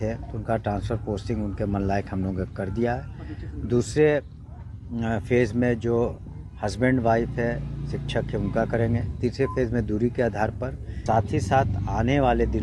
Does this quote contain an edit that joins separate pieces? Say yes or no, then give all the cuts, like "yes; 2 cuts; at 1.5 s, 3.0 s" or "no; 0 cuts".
yes; 1 cut; at 10.9 s